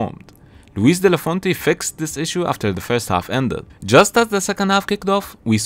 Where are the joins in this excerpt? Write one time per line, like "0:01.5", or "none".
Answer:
none